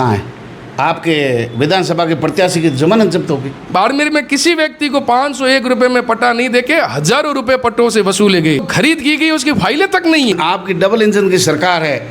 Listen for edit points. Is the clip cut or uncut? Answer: cut